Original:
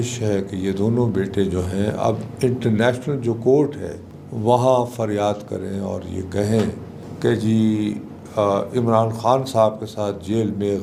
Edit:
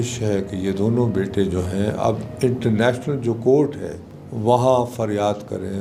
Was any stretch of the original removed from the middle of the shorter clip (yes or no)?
no